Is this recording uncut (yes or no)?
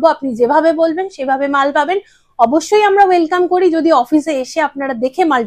yes